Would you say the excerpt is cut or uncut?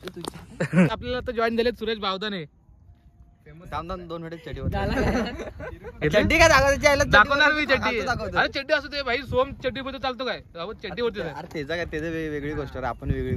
cut